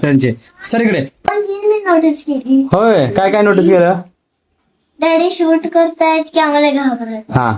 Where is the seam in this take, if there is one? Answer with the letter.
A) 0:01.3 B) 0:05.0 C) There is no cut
A